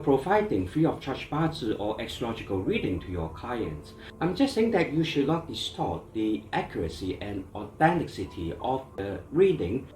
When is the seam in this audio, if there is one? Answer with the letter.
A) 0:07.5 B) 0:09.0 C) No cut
B